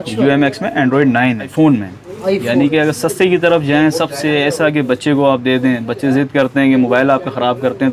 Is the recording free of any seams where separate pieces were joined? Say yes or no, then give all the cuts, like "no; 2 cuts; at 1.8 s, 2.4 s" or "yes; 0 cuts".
no; 1 cut; at 1.5 s